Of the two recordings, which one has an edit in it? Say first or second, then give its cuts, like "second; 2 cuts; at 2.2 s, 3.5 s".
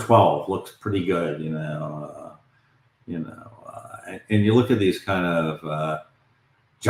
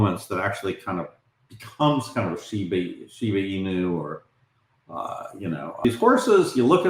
second; 1 cut; at 5.8 s